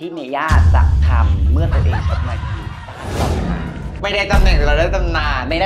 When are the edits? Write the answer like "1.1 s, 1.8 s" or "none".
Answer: none